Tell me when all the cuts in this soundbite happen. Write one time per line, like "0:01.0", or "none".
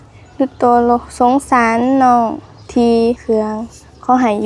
0:03.2